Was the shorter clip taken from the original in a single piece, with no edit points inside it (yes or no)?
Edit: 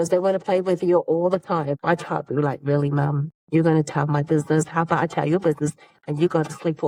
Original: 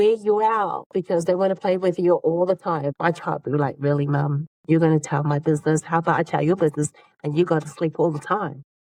yes